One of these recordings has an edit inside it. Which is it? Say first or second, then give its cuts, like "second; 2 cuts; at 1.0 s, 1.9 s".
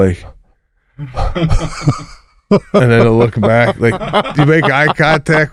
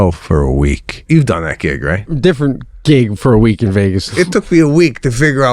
second; 3 cuts; at 1.1 s, 2.1 s, 4.1 s